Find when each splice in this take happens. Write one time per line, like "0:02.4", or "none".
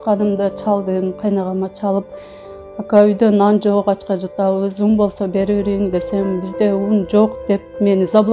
none